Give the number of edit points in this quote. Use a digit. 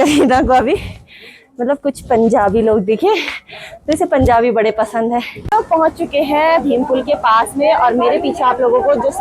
1